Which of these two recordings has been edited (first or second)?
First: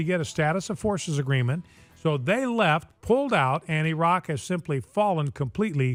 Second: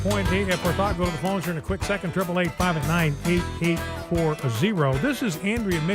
second